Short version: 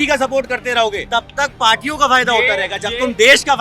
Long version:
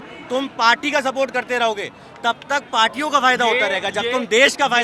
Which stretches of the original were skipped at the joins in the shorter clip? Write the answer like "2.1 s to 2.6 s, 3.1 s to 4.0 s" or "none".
1.9 s to 2.1 s

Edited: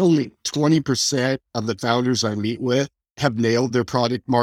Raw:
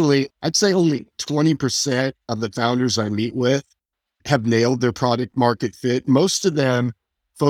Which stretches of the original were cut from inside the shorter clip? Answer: 3.8 s to 4.1 s

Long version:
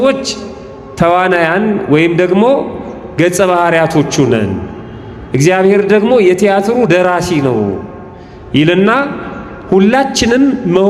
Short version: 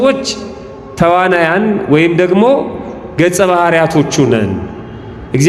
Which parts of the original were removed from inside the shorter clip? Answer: none

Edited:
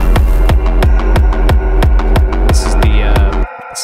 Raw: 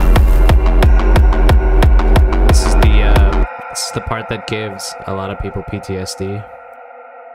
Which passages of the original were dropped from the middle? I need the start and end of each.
none

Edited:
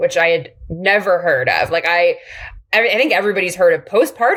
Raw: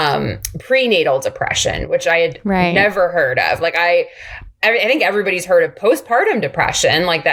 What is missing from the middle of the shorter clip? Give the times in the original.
none

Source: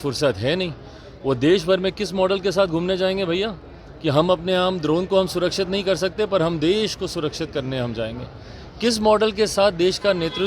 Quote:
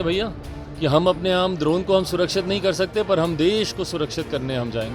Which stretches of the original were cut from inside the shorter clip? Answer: none

